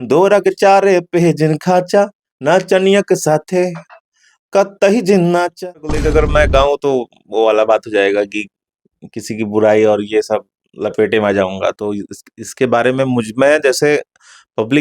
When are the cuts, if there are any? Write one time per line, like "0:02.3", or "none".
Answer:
0:06.0